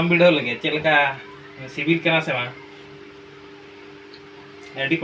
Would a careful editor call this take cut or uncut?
uncut